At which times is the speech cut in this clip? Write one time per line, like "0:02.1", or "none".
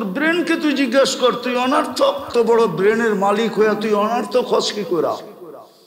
0:02.2

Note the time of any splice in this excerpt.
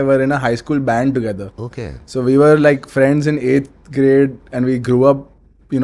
none

